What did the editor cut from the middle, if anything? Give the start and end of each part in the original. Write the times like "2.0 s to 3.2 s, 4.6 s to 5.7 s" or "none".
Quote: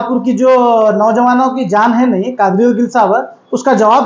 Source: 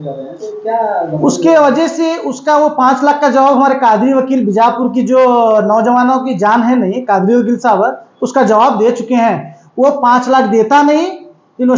none